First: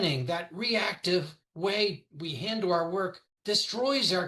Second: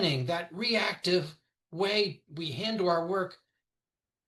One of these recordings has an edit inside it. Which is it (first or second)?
first